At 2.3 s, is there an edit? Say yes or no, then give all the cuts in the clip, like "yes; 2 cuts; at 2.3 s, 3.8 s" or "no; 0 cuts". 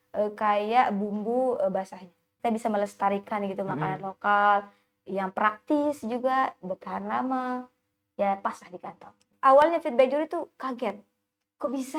yes; 2 cuts; at 2.3 s, 9.3 s